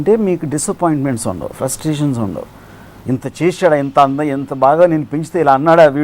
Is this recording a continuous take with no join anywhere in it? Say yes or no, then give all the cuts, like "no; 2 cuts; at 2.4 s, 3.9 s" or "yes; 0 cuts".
yes; 0 cuts